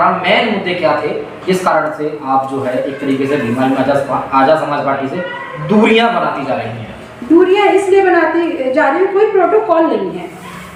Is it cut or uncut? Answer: uncut